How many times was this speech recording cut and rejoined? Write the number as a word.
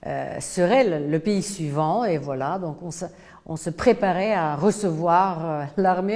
zero